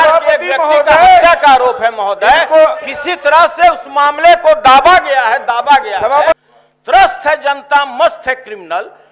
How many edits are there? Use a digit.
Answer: 1